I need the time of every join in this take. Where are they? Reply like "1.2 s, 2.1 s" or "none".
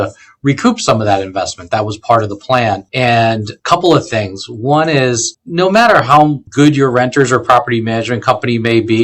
3.4 s, 5.4 s, 6.4 s